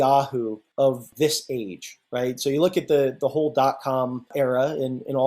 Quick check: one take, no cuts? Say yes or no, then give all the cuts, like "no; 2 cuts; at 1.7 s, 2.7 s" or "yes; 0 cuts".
no; 2 cuts; at 1.0 s, 4.3 s